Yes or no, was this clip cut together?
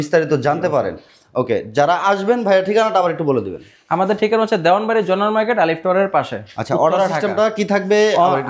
no